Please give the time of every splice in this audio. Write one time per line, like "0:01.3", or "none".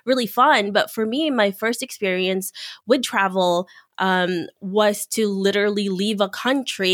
none